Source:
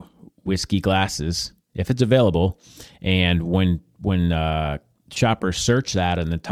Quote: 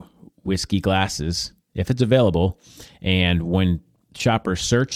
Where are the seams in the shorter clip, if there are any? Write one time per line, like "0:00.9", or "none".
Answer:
0:03.9